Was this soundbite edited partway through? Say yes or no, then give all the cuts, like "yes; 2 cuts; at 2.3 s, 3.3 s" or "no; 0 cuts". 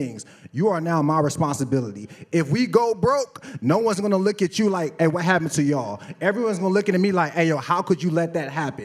no; 0 cuts